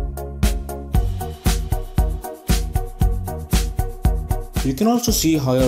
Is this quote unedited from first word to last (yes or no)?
yes